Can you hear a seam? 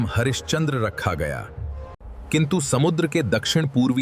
yes; 1 cut; at 2.1 s

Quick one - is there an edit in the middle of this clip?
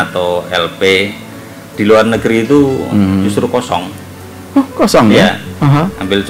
no; 0 cuts

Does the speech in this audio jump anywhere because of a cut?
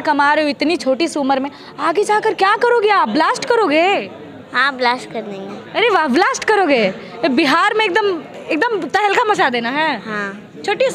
no; 0 cuts

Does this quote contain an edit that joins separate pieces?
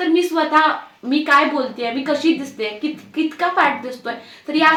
no; 0 cuts

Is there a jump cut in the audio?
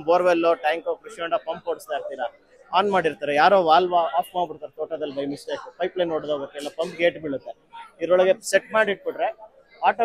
no; 0 cuts

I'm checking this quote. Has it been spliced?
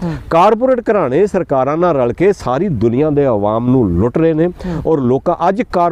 no; 0 cuts

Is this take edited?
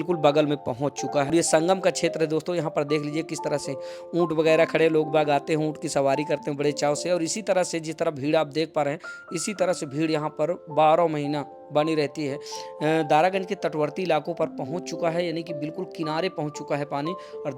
yes; 2 cuts; at 1.3 s, 12.5 s

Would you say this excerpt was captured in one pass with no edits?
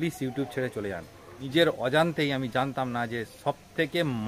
no; 1 cut; at 1.4 s

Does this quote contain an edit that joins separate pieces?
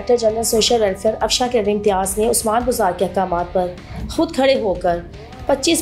no; 0 cuts

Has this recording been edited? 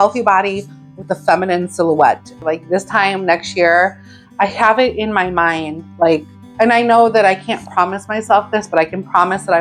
yes; 1 cut; at 2.4 s

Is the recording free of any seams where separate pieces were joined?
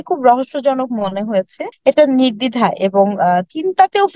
no; 1 cut; at 1.6 s

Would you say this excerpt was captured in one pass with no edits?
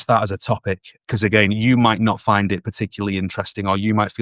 no; 1 cut; at 0.9 s

